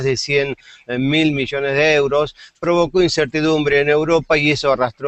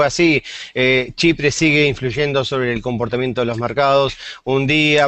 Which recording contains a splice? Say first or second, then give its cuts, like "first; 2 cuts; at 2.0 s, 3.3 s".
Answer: second; 1 cut; at 2.9 s